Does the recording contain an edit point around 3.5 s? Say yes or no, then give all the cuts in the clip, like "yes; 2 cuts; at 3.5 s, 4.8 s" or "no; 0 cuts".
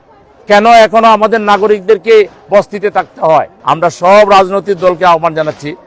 yes; 1 cut; at 3.5 s